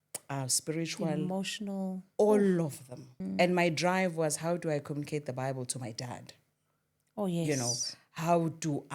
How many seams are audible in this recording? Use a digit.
1